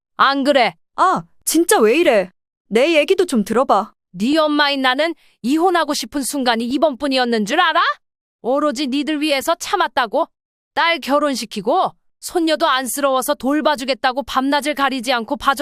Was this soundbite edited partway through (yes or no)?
no